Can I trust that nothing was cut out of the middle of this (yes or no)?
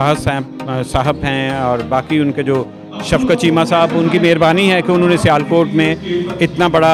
yes